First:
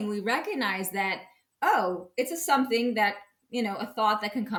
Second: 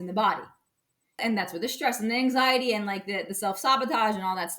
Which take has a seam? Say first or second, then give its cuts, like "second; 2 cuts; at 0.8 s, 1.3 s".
second; 1 cut; at 1.2 s